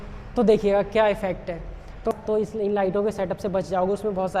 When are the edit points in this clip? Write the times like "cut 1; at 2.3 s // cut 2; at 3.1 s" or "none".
cut 1; at 2.1 s